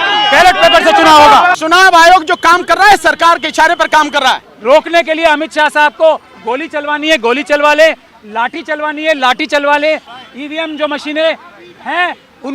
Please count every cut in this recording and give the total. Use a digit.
3